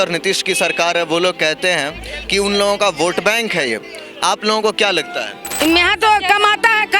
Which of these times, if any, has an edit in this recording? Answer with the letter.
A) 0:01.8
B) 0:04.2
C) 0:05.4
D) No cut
C